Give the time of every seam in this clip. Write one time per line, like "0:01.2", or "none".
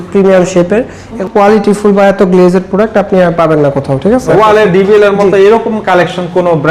0:01.2
0:04.3